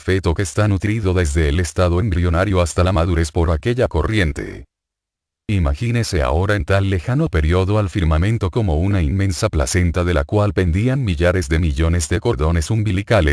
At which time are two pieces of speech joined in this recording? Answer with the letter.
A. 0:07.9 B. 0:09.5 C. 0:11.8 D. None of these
A